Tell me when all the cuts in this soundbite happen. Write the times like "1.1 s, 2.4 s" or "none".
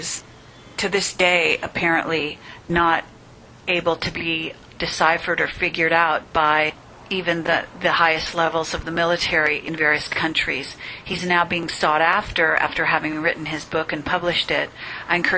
none